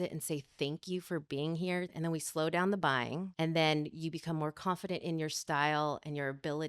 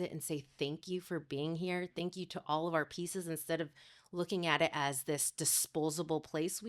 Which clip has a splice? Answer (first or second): first